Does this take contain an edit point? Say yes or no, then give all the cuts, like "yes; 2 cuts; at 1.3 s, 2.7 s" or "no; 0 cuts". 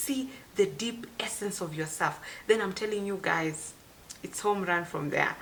no; 0 cuts